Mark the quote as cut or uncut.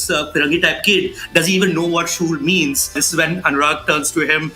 cut